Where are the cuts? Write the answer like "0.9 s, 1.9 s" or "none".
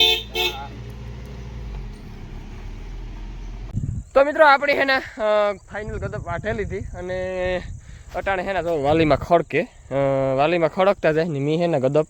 3.7 s